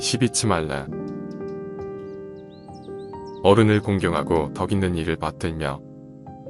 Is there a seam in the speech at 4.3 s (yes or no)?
no